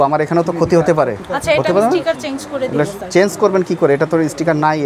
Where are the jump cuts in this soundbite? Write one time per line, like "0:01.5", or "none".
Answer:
none